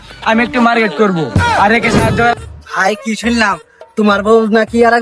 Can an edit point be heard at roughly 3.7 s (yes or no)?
no